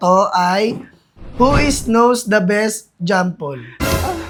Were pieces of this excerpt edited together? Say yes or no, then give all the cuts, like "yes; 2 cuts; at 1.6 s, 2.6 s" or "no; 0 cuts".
no; 0 cuts